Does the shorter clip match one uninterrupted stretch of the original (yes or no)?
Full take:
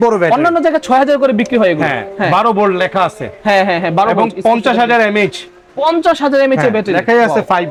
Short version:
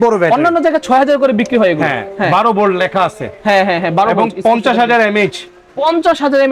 yes